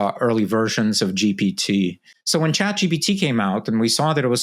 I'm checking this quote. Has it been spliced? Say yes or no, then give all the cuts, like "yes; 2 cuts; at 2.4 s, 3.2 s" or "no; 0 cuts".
yes; 1 cut; at 2.1 s